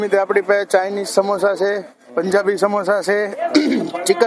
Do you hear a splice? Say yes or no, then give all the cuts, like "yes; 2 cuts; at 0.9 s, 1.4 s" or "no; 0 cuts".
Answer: no; 0 cuts